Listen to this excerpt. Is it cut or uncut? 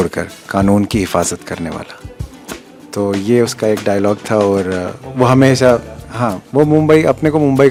uncut